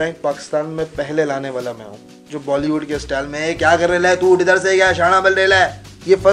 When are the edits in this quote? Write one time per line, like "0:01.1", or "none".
none